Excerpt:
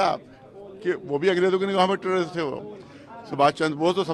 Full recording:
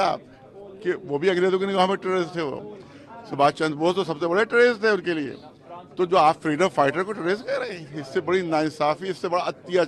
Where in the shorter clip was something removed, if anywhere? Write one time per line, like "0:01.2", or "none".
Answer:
none